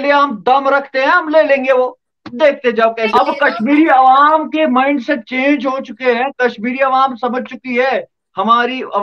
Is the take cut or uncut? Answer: cut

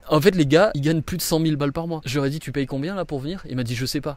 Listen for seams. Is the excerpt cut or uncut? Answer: cut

